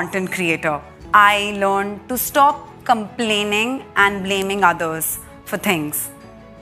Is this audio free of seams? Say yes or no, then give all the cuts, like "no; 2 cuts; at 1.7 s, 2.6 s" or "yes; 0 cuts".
no; 1 cut; at 0.9 s